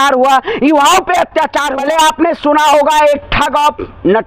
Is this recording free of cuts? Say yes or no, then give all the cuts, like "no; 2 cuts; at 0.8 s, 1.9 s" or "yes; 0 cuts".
no; 1 cut; at 1.7 s